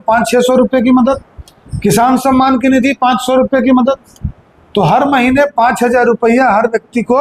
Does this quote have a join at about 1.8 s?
no; 0 cuts

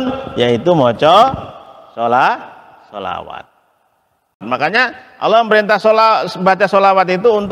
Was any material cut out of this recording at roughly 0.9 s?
no; 1 cut; at 4.5 s

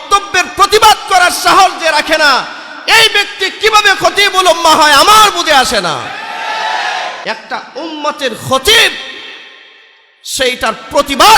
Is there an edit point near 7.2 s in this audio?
yes; 1 cut; at 7.2 s

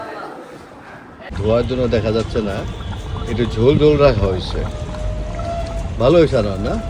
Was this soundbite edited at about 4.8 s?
no; 1 cut; at 1.4 s

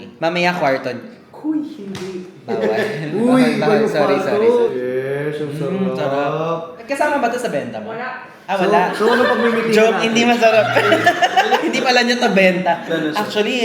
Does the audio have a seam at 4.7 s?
no; 0 cuts

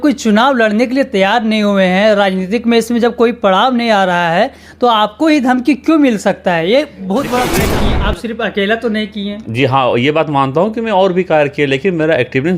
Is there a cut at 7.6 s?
yes; 1 cut; at 7.6 s

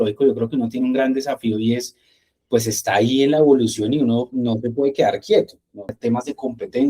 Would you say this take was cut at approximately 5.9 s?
yes; 1 cut; at 5.9 s

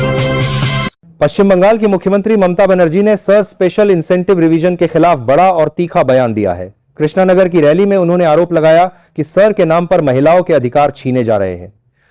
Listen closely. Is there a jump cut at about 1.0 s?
yes; 1 cut; at 1.0 s

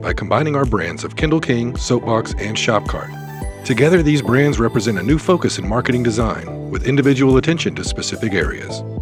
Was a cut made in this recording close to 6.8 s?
no; 0 cuts

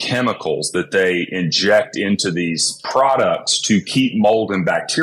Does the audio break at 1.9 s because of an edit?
no; 0 cuts

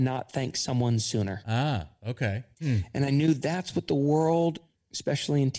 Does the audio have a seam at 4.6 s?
no; 2 cuts; at 1.4 s, 2.5 s

